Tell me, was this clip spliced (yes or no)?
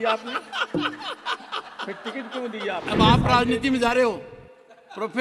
yes